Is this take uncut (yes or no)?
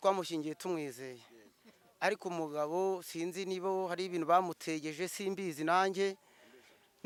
yes